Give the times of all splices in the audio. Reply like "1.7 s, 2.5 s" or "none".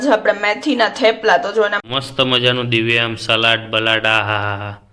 1.8 s

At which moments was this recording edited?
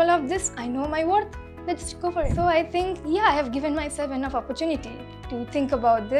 2.3 s

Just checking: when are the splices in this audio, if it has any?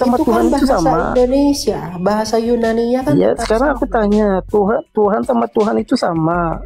none

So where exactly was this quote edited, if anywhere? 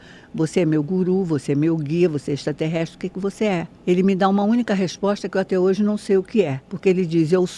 6.6 s

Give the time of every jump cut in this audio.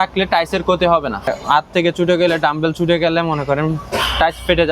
1.4 s

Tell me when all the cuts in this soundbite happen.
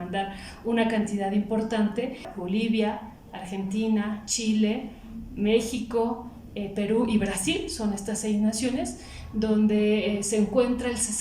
2.3 s

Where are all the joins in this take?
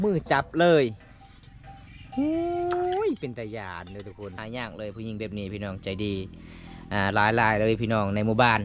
4.4 s

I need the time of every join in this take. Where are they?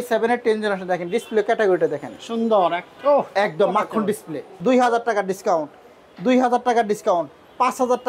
4.5 s

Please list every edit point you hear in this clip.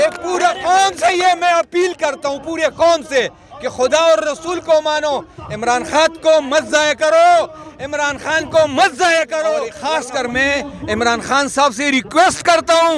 9.7 s

